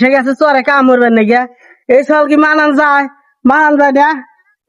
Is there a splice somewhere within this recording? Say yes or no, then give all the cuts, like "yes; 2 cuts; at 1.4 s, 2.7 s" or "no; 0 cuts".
no; 0 cuts